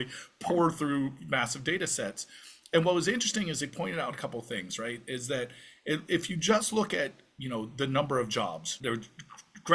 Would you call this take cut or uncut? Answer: cut